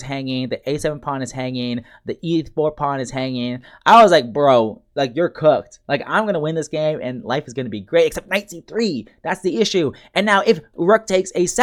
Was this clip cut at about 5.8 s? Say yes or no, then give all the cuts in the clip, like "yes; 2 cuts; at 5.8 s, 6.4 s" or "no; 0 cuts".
no; 0 cuts